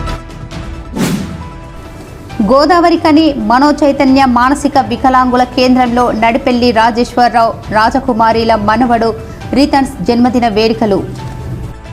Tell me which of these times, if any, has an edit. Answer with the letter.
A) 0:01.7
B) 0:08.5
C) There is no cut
A